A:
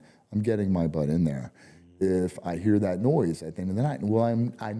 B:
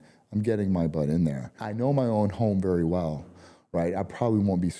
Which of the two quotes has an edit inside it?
B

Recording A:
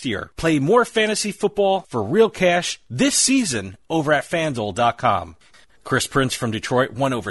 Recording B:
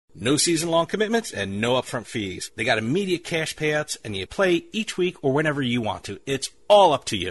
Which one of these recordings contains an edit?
A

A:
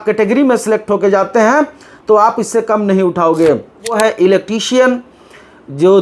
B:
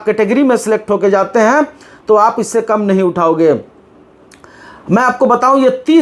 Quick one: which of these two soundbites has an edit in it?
A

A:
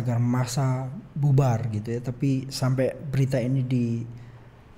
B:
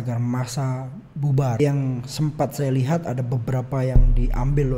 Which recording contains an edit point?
B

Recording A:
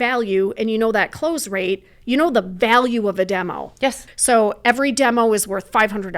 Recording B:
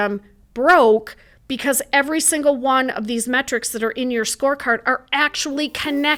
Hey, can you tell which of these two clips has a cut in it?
A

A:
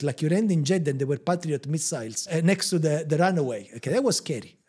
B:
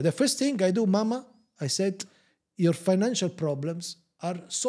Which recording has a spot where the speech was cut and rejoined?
A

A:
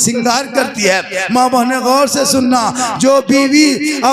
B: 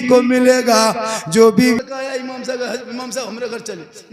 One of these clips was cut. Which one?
B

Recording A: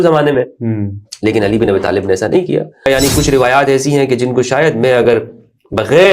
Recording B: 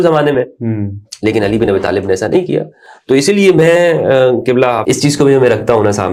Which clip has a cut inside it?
A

